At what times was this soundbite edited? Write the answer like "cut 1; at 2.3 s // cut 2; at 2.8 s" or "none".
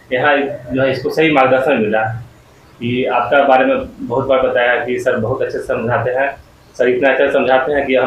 none